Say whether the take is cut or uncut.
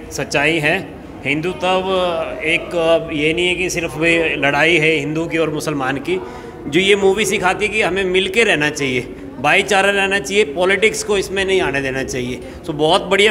uncut